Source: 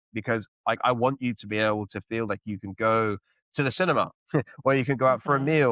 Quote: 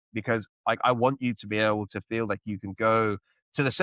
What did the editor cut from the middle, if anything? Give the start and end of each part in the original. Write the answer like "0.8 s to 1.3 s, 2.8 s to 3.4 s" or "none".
none